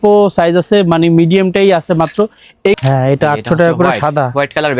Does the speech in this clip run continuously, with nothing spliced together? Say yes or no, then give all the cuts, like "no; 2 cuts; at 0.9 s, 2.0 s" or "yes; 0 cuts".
no; 1 cut; at 2.8 s